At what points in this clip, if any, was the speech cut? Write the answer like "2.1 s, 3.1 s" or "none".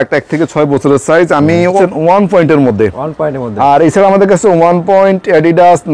1.8 s